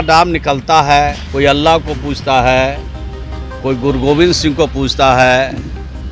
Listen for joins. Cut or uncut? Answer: cut